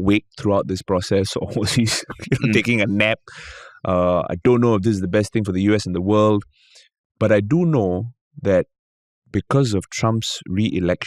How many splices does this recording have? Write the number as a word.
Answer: zero